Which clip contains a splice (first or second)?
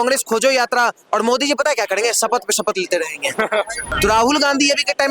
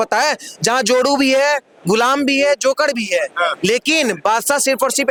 first